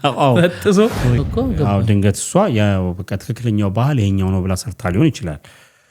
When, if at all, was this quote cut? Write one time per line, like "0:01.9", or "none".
0:01.2